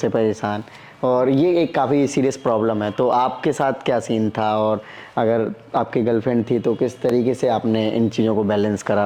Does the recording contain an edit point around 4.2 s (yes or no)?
no